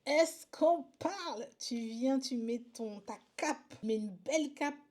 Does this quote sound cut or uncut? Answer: cut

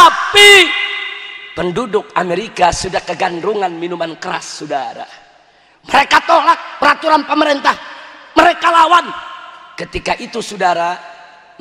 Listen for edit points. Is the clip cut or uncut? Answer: uncut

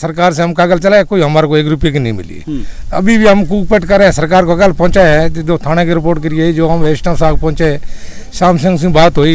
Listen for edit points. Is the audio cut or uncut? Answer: uncut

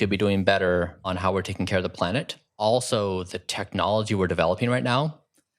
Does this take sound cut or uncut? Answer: cut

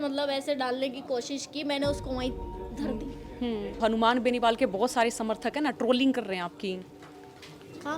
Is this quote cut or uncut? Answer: cut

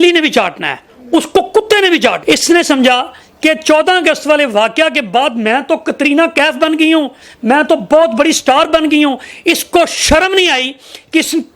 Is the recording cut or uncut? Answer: cut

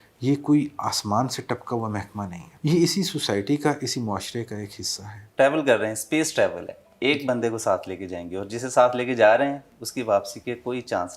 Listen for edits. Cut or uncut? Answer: cut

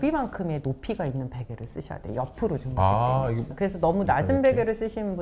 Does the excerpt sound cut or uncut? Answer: cut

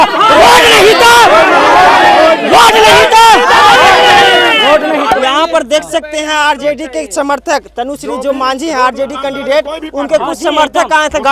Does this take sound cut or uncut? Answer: cut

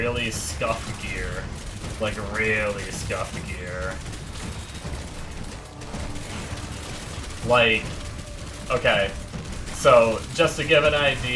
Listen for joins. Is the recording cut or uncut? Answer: uncut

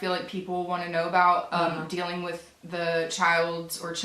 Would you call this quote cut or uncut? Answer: uncut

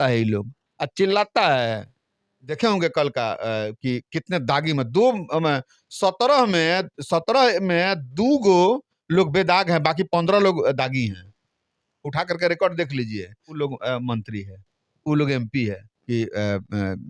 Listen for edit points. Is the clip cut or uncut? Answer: cut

